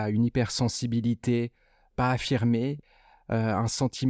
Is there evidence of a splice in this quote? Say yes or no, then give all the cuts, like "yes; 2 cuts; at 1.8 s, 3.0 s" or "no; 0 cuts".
yes; 1 cut; at 2.8 s